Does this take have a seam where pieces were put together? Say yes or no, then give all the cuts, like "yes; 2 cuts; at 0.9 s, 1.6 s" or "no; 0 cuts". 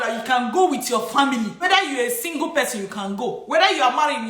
yes; 1 cut; at 1.6 s